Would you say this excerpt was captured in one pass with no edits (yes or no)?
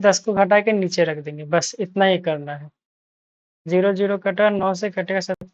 yes